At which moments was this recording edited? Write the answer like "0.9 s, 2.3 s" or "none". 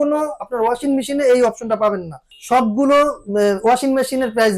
2.3 s